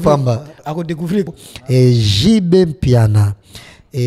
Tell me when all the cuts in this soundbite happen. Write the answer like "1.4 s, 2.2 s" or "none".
1.3 s